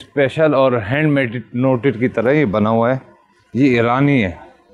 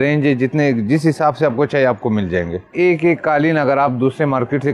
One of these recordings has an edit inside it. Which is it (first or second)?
second